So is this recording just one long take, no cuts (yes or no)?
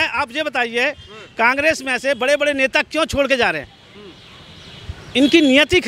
yes